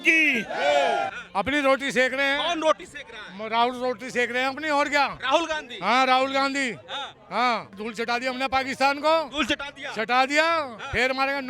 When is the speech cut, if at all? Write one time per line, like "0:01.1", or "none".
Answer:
0:01.1
0:07.8